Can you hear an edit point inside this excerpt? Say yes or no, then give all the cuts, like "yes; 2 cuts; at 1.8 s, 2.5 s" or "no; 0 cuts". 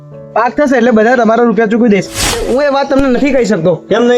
yes; 1 cut; at 2.3 s